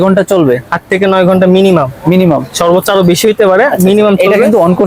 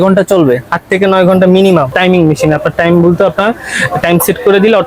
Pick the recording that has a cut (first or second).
second